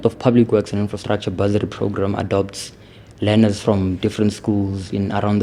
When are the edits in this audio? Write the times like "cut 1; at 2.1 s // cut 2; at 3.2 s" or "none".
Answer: none